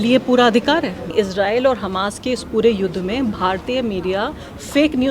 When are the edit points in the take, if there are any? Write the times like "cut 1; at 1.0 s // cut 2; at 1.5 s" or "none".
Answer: cut 1; at 1.1 s